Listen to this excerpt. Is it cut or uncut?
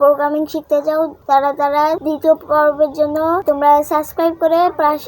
cut